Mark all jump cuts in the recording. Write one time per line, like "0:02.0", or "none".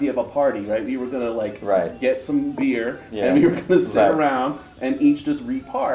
none